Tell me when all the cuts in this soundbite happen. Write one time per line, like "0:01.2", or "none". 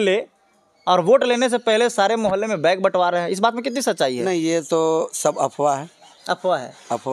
none